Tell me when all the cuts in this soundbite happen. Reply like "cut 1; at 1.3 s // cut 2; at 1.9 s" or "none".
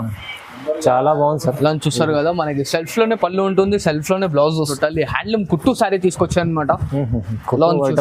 cut 1; at 4.7 s